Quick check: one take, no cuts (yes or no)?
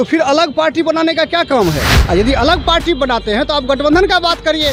yes